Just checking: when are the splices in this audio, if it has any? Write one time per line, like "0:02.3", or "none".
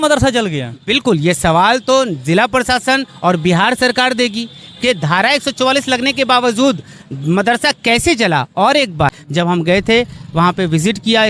0:09.2